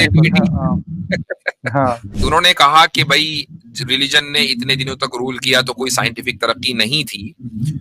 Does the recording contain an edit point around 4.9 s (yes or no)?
no